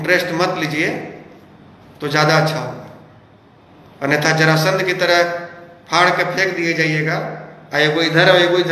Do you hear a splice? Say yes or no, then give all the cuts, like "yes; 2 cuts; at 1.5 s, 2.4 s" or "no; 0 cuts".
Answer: no; 0 cuts